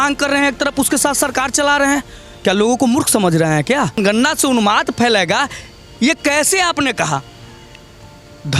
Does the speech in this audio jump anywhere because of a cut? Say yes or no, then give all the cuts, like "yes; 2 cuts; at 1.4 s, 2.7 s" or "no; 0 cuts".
yes; 1 cut; at 4.0 s